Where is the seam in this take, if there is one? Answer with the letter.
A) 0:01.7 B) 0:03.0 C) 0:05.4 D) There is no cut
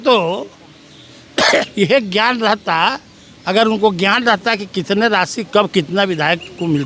A